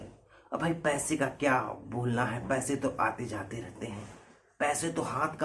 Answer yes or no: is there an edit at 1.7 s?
no